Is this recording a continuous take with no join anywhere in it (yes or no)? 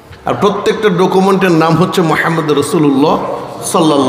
yes